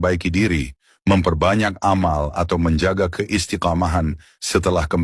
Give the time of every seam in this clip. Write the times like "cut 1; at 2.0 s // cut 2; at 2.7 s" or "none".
none